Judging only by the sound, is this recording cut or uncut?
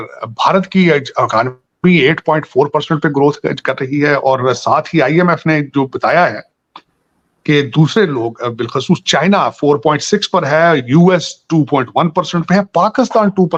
uncut